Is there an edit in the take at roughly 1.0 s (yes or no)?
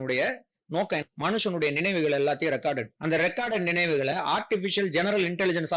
yes